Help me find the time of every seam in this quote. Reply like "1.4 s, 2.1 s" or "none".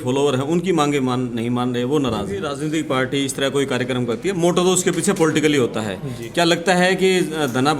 2.5 s